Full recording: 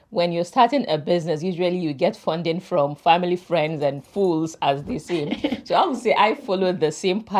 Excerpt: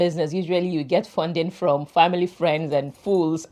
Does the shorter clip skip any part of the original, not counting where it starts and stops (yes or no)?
no